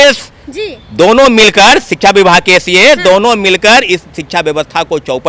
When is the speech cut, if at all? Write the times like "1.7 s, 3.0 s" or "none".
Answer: none